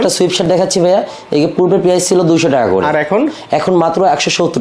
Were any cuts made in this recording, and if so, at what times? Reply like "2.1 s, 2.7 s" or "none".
none

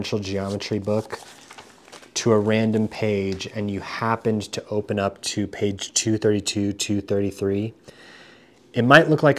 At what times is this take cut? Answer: none

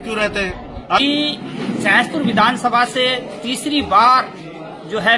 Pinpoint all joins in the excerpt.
1.0 s

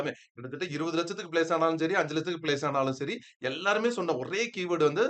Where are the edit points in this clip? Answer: none

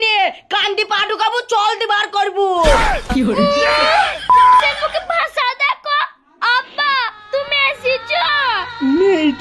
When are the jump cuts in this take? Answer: none

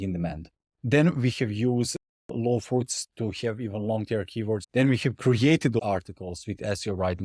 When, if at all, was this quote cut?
4.6 s, 5.8 s

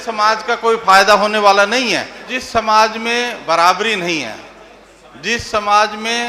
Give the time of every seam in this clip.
2.4 s

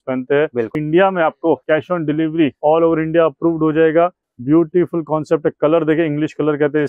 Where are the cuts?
0.8 s, 1.6 s, 2.6 s, 4.3 s

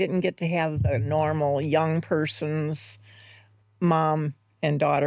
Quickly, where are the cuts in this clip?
none

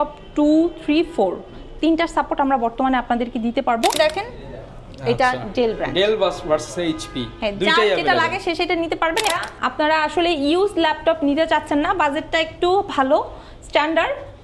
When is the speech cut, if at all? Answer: 3.9 s, 9.3 s

